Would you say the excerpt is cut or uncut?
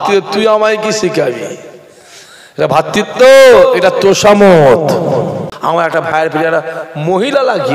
cut